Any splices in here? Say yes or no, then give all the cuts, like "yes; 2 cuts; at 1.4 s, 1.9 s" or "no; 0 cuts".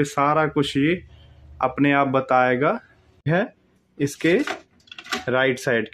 yes; 1 cut; at 3.3 s